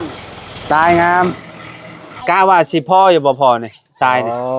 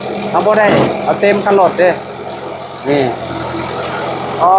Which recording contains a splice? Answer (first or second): first